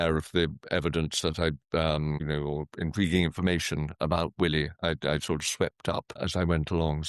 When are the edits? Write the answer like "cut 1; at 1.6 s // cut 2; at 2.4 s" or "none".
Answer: cut 1; at 2.2 s // cut 2; at 6.2 s